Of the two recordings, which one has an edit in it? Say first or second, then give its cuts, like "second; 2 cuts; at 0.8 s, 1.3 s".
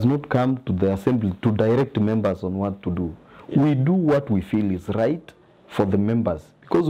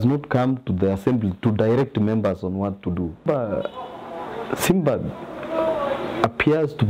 second; 1 cut; at 3.3 s